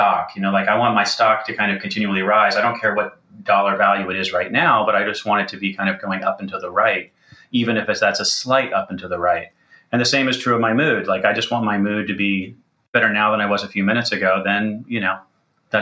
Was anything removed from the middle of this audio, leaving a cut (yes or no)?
yes